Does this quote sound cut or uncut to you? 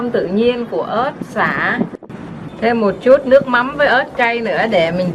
cut